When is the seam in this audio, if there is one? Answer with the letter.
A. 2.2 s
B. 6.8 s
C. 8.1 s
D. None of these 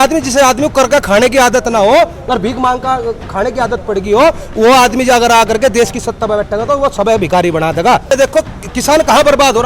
C